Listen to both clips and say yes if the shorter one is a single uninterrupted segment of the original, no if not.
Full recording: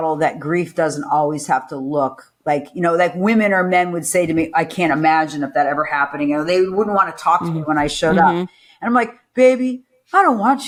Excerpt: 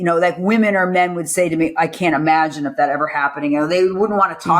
yes